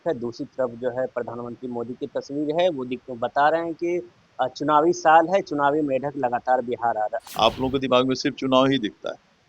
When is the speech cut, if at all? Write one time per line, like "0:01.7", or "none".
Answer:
0:07.2